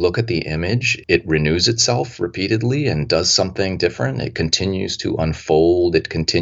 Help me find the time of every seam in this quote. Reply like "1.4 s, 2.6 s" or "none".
1.0 s

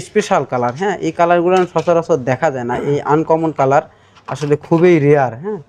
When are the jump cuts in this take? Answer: none

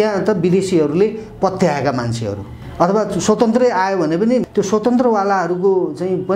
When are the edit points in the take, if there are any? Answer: 2.6 s, 4.5 s

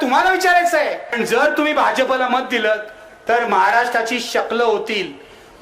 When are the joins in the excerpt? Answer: 1.1 s

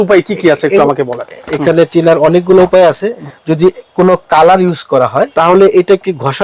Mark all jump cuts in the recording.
1.5 s, 3.2 s, 5.3 s

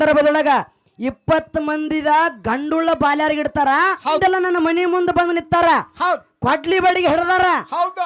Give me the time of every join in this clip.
4.2 s

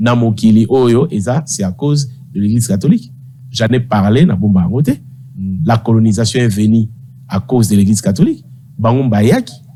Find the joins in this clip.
none

